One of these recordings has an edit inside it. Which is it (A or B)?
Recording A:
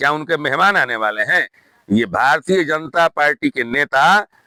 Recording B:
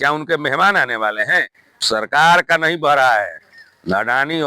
B